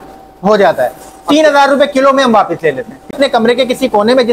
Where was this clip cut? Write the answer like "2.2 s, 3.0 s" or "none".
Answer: 3.1 s